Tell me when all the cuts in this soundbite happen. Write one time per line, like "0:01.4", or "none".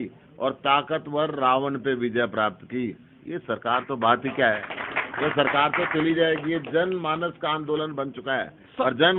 none